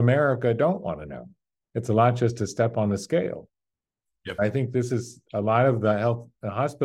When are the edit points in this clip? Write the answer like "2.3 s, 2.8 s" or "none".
none